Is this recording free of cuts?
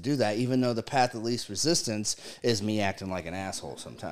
yes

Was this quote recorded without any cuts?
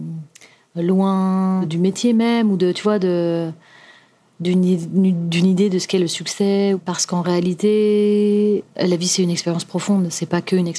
no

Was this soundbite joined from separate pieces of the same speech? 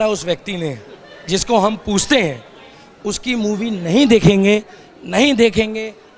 no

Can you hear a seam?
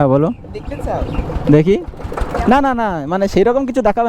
no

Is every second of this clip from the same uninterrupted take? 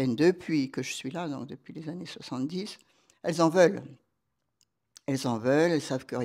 yes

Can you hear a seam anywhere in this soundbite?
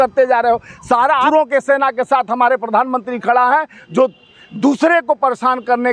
yes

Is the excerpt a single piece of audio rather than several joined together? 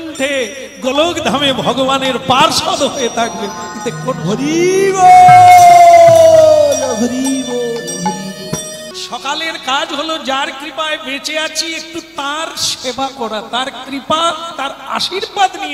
no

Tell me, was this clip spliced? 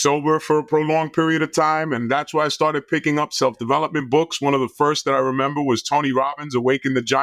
no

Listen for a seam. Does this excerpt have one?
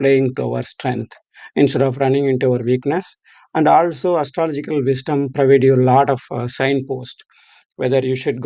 no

